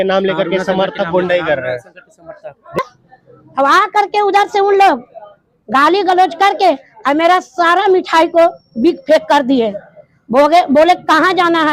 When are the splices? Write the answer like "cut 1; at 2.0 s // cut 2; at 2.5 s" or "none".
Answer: cut 1; at 2.8 s